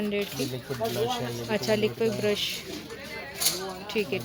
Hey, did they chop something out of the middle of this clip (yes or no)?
no